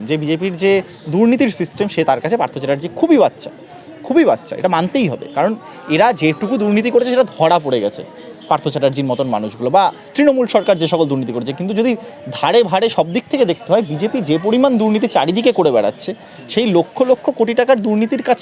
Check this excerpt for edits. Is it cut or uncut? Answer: uncut